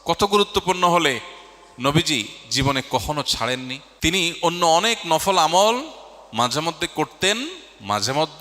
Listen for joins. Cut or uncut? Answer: cut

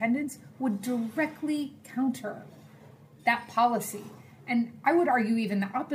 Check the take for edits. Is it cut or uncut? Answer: uncut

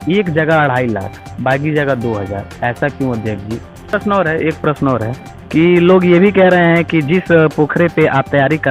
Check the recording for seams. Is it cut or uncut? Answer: cut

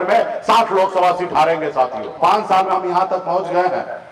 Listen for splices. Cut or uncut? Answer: cut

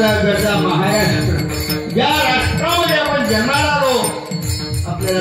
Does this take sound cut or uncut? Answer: uncut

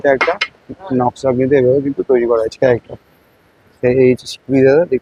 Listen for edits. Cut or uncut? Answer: uncut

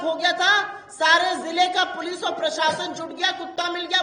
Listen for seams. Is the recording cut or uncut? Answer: uncut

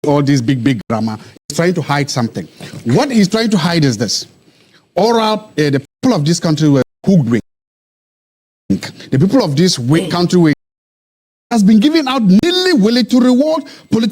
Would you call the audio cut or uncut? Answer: cut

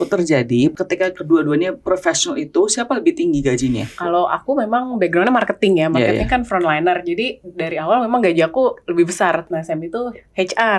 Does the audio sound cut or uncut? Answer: cut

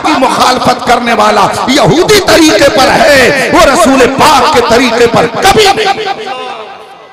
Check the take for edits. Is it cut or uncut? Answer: uncut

